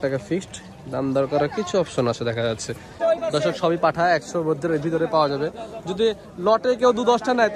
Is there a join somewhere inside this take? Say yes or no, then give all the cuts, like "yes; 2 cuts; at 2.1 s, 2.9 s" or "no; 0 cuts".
yes; 1 cut; at 3.0 s